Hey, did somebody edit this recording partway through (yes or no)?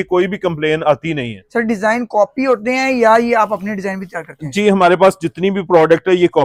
no